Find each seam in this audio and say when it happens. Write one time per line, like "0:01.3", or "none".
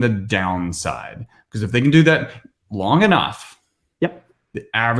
none